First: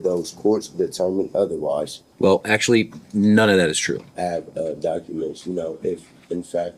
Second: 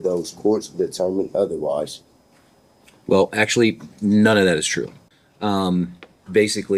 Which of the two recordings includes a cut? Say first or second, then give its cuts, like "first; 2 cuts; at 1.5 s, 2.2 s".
first; 2 cuts; at 2.0 s, 4.1 s